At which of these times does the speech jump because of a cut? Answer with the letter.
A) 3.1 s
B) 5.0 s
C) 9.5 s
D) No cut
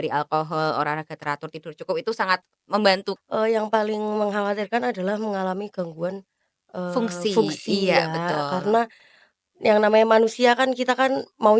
A